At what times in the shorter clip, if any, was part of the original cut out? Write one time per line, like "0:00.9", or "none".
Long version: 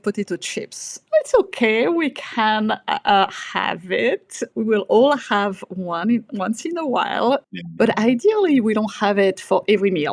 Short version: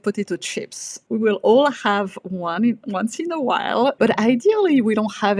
0:00.9
0:04.0